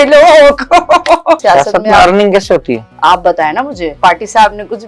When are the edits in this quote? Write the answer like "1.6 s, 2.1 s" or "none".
1.4 s, 2.9 s, 3.9 s